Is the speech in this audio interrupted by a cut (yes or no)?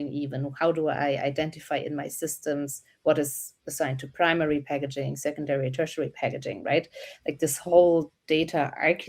no